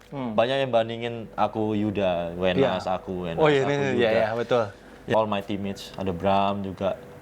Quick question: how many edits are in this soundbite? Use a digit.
1